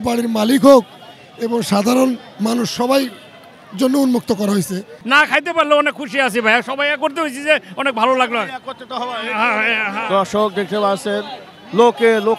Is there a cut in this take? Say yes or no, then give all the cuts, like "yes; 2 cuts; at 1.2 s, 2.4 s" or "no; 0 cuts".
yes; 2 cuts; at 4.9 s, 10.0 s